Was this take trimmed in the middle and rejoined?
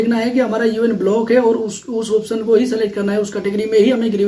no; 0 cuts

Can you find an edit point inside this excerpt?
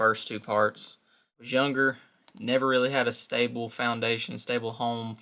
yes; 1 cut; at 1.4 s

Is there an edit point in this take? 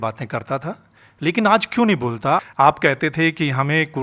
yes; 1 cut; at 2.4 s

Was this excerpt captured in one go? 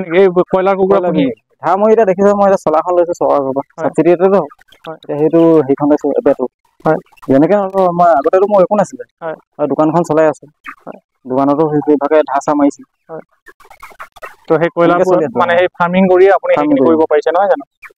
yes; 0 cuts

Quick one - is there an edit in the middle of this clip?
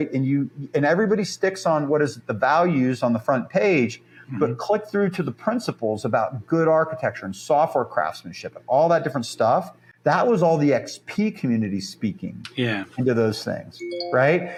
no; 0 cuts

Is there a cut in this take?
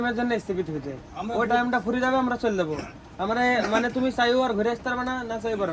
no; 0 cuts

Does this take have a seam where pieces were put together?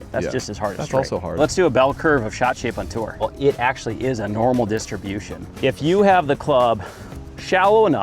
yes; 3 cuts; at 1.4 s, 3.3 s, 5.5 s

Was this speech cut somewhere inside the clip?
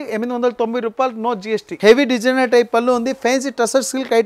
yes; 1 cut; at 1.7 s

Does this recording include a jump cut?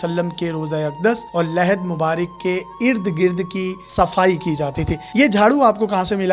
no; 0 cuts

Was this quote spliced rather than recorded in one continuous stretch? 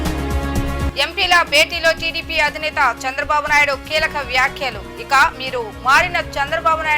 yes; 1 cut; at 0.9 s

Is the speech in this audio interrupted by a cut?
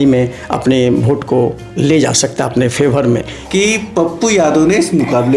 yes; 1 cut; at 3.3 s

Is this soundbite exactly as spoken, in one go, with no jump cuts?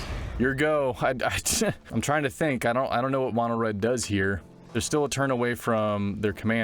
no; 1 cut; at 1.8 s

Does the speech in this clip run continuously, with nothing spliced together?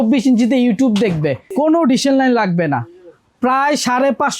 no; 1 cut; at 1.4 s

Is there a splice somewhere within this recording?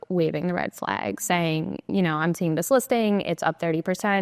no; 0 cuts

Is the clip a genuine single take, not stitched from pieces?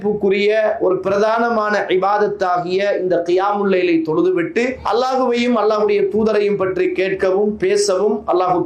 no; 1 cut; at 4.8 s

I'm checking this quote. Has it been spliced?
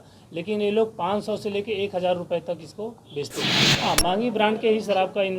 yes; 1 cut; at 3.5 s

